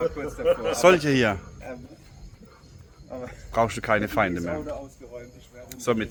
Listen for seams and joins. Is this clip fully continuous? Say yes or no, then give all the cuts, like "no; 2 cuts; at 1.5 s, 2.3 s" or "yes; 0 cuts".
yes; 0 cuts